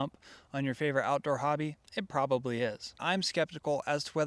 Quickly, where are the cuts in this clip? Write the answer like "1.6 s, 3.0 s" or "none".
1.7 s, 2.9 s